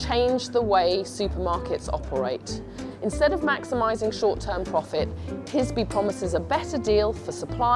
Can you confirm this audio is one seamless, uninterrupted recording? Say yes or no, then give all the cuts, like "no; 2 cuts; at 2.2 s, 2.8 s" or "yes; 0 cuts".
no; 1 cut; at 5.5 s